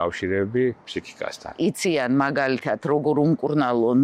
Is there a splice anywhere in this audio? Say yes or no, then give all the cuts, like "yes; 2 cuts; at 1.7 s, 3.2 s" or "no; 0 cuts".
yes; 1 cut; at 1.6 s